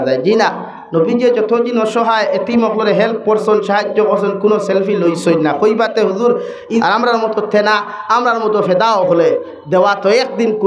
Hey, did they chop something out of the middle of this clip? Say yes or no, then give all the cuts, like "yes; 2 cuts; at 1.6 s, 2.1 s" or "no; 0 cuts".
yes; 1 cut; at 6.8 s